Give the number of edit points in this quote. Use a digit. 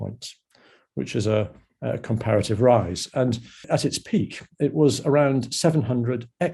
1